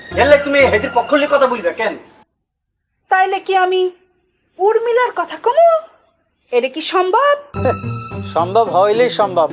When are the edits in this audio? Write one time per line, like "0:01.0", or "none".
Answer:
0:07.5